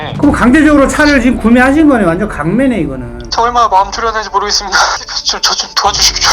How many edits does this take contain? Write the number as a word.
one